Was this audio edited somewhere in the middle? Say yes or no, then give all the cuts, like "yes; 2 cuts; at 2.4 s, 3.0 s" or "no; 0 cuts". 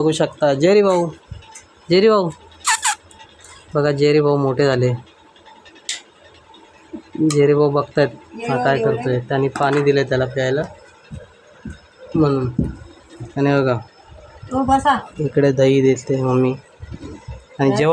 no; 0 cuts